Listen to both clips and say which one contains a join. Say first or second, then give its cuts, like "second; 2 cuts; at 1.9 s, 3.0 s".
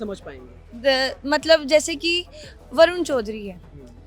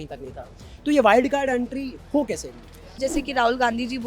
second; 1 cut; at 3.0 s